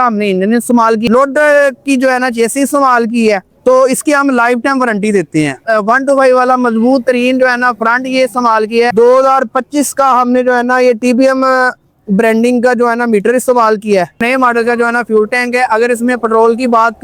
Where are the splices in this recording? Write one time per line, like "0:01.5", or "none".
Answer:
0:01.1
0:05.6
0:08.9
0:14.2